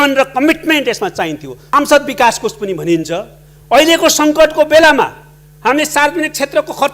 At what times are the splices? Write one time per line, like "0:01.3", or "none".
0:01.6

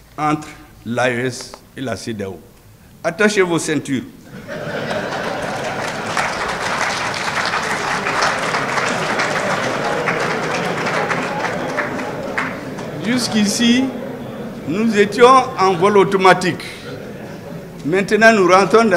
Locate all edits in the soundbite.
none

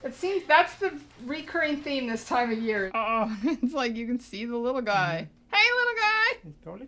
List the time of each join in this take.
0:02.9

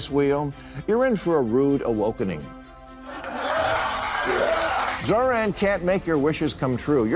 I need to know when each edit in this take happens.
0:04.9

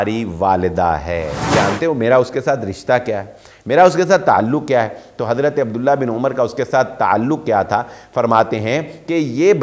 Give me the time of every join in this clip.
0:01.4

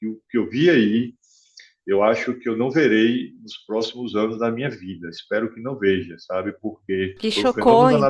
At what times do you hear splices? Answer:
0:07.1

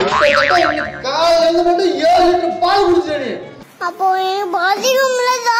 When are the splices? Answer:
none

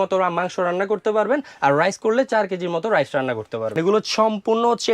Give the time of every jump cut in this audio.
0:03.7

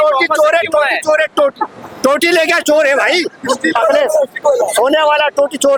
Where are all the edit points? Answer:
none

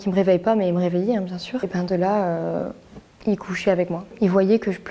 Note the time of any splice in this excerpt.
0:01.6
0:04.0

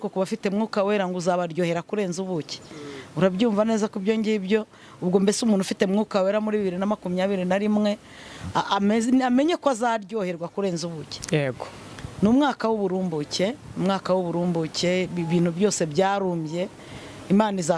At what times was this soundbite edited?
none

